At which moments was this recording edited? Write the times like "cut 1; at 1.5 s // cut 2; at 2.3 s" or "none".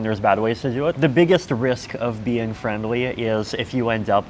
cut 1; at 0.9 s